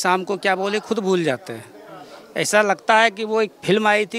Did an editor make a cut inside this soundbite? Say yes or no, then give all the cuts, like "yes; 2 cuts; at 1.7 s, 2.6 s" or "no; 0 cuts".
no; 0 cuts